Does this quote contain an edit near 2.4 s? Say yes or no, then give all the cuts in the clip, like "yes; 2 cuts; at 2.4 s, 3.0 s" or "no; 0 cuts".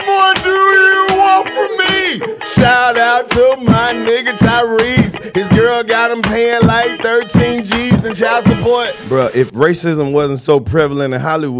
no; 1 cut; at 9.0 s